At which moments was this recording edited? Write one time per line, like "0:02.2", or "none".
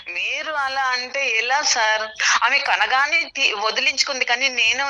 0:02.2